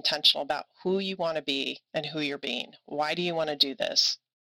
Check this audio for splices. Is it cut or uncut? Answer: cut